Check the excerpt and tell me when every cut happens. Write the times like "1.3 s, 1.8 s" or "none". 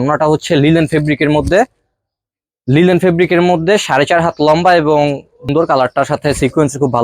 5.5 s